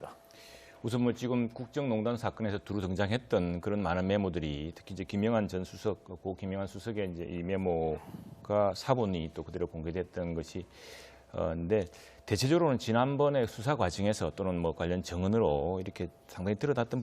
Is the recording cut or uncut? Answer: cut